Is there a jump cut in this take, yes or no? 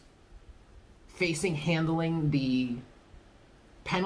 no